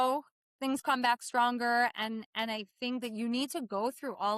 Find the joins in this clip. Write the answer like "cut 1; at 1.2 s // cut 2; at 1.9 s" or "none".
none